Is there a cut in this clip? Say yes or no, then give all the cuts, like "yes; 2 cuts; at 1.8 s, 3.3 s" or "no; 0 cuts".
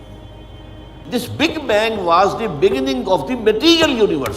yes; 1 cut; at 1.0 s